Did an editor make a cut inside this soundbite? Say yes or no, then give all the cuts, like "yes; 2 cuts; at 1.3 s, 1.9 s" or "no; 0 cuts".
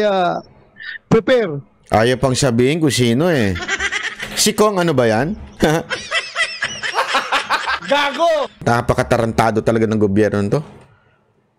yes; 1 cut; at 8.6 s